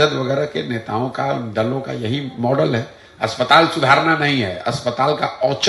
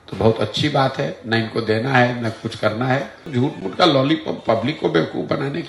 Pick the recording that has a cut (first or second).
second